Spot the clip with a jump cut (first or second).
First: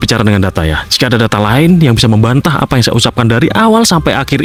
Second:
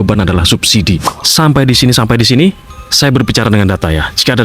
second